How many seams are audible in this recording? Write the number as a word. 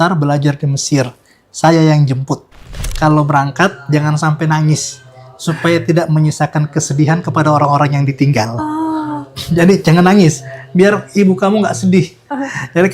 one